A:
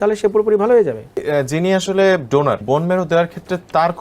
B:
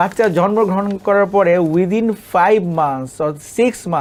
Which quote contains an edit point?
A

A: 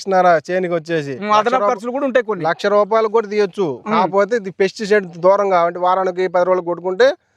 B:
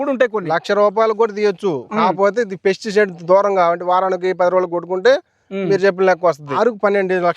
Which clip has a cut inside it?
B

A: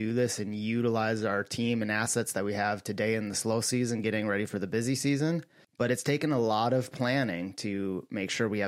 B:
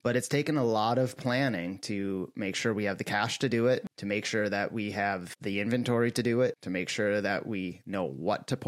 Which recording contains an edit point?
B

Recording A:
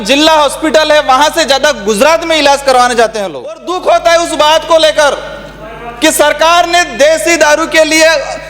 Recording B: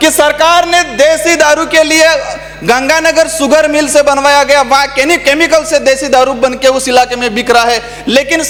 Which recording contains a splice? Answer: A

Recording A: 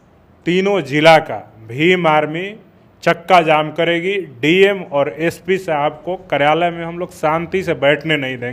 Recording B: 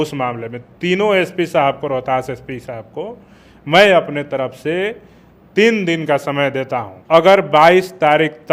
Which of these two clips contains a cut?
B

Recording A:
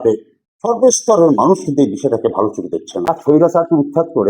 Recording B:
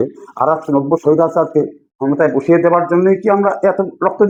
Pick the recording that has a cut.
A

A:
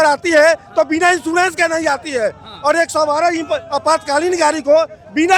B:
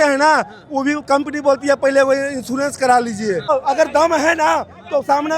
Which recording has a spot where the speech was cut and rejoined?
B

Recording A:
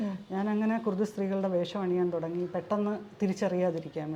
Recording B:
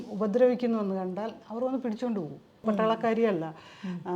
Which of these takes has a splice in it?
B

